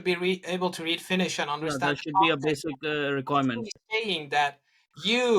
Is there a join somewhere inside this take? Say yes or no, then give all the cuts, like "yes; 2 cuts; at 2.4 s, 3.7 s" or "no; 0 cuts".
no; 0 cuts